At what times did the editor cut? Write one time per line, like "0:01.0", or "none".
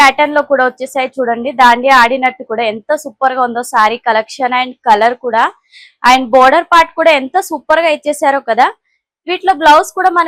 none